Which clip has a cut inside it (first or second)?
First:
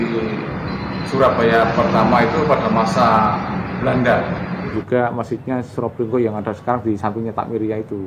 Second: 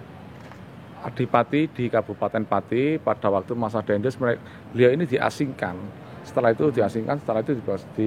first